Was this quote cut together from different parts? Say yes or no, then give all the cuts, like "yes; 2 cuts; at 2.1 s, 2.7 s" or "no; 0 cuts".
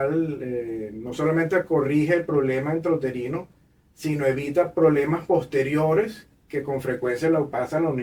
no; 0 cuts